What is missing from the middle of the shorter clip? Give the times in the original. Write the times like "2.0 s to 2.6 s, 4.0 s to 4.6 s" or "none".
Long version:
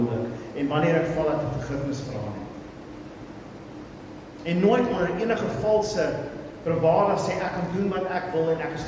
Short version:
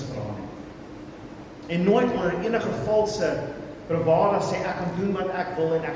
3.4 s to 4.2 s